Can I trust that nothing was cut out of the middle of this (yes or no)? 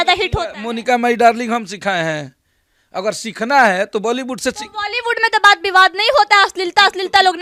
yes